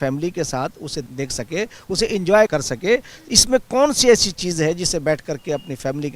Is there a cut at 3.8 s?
no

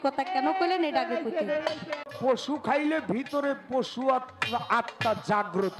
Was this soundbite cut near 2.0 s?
yes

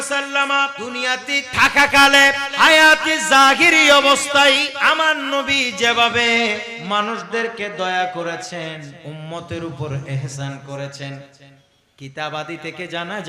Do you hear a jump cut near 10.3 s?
no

